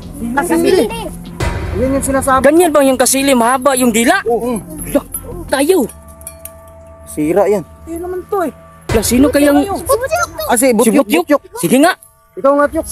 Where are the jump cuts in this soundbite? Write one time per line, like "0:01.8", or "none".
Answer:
0:05.5